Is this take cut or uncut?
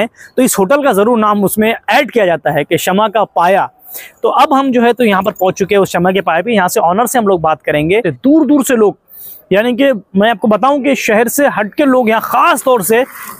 cut